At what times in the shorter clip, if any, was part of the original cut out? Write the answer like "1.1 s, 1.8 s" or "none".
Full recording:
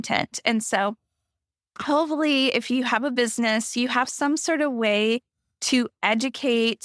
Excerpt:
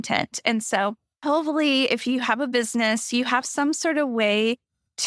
1.1 s